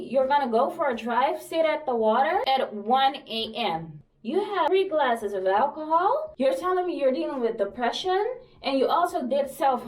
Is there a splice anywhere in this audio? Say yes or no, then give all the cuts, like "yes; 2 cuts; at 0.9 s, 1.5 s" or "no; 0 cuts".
yes; 3 cuts; at 2.4 s, 4.3 s, 6.3 s